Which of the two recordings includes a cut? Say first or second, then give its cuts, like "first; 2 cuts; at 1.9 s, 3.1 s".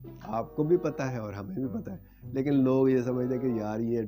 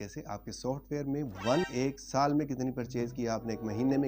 second; 1 cut; at 1.7 s